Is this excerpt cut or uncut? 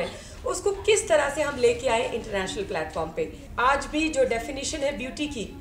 cut